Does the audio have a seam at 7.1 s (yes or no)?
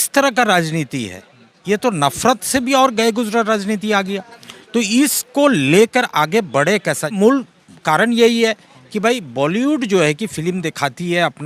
yes